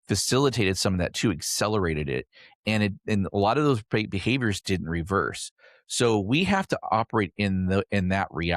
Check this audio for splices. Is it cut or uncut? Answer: uncut